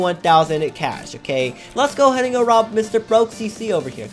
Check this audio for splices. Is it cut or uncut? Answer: cut